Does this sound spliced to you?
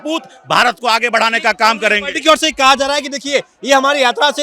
no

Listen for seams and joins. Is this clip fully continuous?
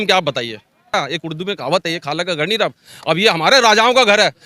no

